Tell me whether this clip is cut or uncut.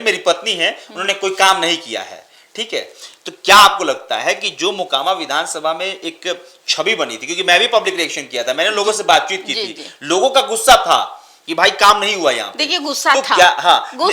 uncut